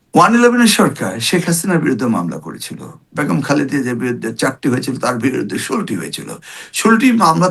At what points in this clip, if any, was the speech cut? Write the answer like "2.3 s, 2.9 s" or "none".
none